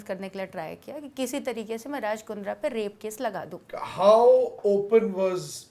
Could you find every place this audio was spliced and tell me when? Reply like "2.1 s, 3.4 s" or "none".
3.5 s